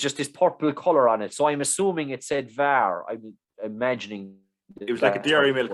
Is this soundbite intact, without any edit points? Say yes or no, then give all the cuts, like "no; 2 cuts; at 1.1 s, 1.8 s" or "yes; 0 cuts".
yes; 0 cuts